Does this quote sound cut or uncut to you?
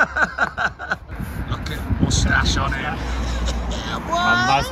cut